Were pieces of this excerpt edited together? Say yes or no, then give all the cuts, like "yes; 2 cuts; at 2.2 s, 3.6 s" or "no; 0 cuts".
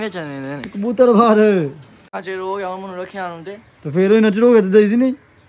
yes; 1 cut; at 2.1 s